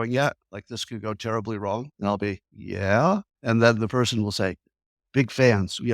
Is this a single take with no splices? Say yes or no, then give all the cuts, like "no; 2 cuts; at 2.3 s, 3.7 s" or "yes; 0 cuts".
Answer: no; 3 cuts; at 1.9 s, 2.5 s, 3.3 s